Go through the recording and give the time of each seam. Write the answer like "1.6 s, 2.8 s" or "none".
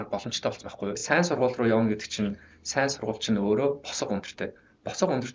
1.0 s